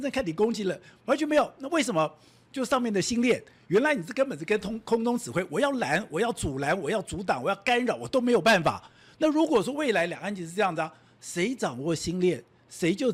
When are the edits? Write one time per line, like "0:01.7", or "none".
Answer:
none